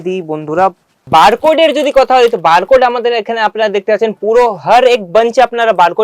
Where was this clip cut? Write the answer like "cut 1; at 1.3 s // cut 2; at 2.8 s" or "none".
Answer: cut 1; at 0.9 s